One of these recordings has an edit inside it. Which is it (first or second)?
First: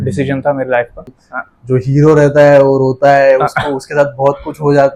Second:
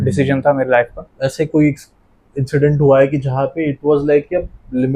first